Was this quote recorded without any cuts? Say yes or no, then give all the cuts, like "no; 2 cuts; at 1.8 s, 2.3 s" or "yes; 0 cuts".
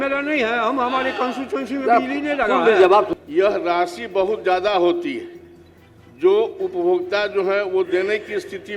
no; 1 cut; at 3.1 s